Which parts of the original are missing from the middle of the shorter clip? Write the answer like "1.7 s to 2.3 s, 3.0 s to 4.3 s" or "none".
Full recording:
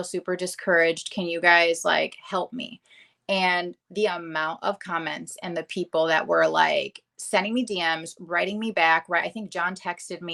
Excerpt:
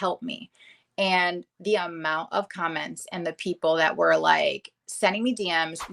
none